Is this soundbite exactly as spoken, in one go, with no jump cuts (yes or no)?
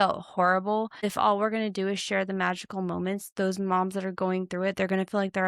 no